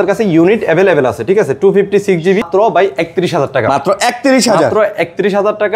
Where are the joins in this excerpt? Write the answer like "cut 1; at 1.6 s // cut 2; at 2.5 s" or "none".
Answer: cut 1; at 2.5 s